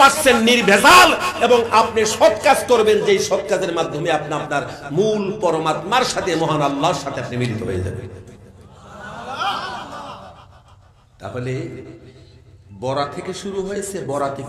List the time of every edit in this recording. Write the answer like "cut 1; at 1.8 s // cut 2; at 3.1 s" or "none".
none